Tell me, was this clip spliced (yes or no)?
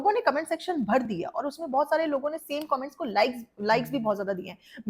no